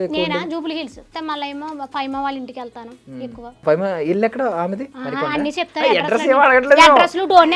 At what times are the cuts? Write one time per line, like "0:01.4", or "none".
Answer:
0:01.1
0:03.6
0:04.9